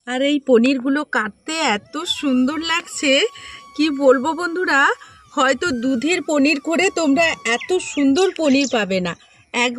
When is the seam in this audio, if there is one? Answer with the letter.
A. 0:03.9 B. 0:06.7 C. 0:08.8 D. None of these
D